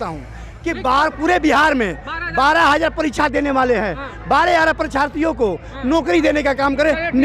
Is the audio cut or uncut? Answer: uncut